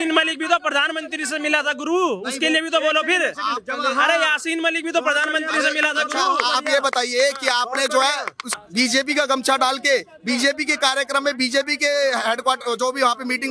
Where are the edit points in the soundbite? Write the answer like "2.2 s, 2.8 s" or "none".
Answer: 8.4 s